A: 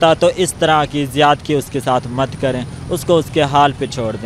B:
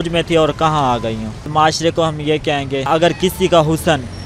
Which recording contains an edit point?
B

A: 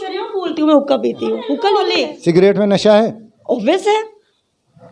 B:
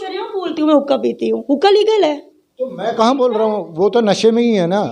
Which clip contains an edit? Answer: A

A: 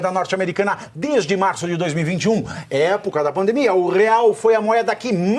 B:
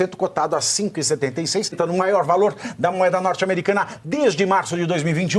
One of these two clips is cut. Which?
B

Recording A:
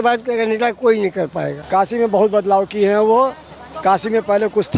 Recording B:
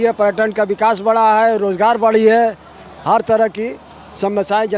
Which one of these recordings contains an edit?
A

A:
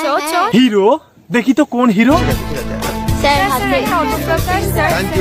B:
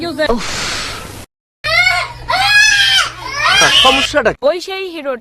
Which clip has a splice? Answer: B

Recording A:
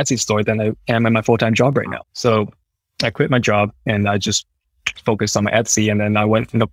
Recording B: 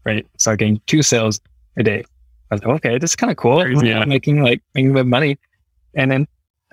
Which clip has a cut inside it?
A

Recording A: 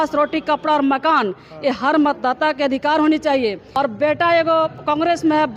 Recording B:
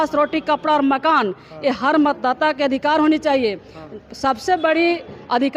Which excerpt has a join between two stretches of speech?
A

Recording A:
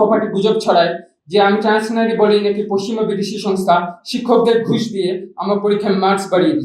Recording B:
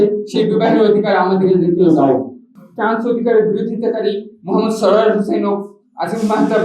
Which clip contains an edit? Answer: B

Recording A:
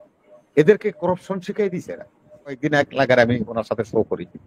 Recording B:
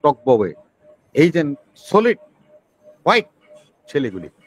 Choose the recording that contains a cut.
A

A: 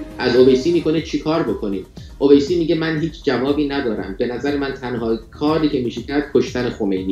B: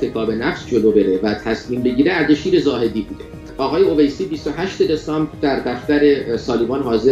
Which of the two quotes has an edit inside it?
B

